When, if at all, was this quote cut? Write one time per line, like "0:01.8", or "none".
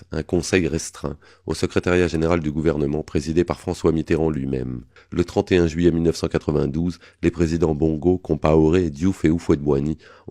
0:04.8